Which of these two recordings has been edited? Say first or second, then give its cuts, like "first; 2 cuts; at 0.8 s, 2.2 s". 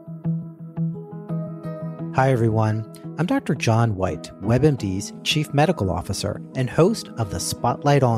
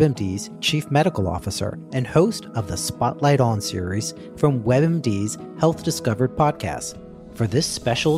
first; 1 cut; at 2.1 s